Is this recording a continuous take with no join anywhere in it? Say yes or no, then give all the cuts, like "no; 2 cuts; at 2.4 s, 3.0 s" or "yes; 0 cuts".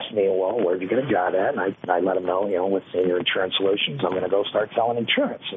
yes; 0 cuts